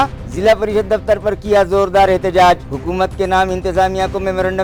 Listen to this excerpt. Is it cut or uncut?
uncut